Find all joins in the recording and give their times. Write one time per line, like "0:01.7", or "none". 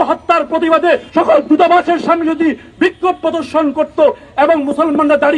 0:01.1